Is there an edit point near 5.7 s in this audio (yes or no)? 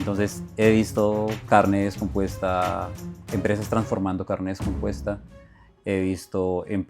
no